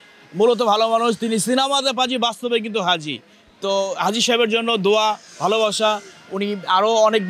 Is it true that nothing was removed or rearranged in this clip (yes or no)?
yes